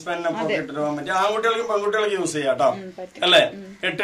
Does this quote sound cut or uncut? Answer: uncut